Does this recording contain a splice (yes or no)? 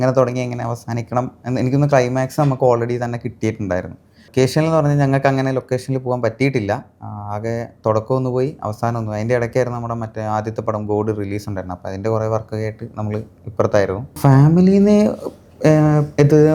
yes